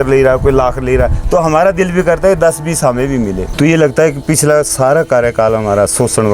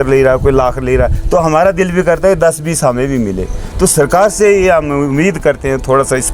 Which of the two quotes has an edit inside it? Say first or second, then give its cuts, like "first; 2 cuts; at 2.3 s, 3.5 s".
first; 1 cut; at 3.4 s